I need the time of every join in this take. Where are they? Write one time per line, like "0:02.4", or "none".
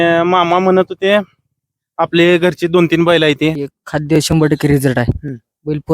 0:03.6

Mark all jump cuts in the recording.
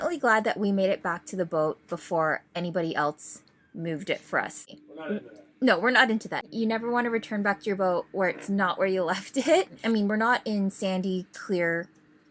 none

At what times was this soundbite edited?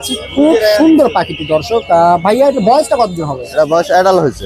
none

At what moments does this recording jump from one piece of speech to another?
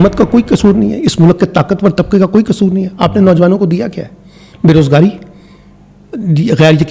none

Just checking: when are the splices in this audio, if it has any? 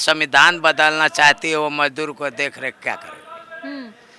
none

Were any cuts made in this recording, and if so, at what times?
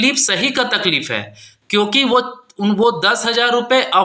none

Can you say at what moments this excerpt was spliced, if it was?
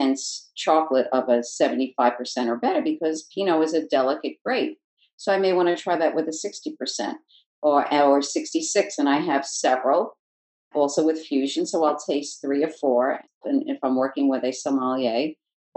0:13.3

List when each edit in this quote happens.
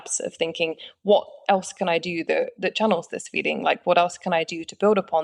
none

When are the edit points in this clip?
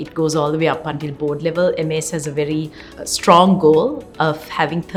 none

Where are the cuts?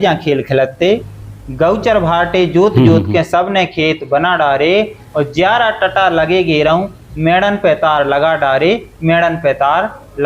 0:01.1

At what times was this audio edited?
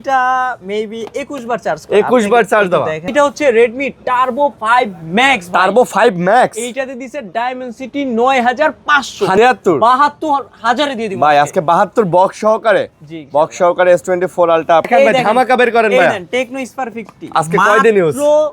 0:03.1
0:09.4
0:14.9

